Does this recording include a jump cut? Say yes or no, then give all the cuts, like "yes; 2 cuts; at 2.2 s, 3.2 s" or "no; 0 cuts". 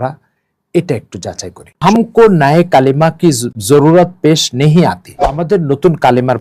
yes; 3 cuts; at 1.8 s, 3.5 s, 5.4 s